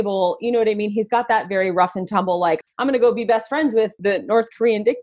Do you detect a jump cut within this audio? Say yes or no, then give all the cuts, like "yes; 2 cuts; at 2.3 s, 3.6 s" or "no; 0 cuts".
yes; 2 cuts; at 2.6 s, 4.0 s